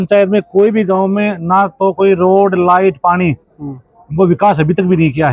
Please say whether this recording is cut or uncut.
uncut